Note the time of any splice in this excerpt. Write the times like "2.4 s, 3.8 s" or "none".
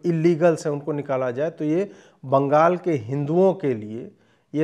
none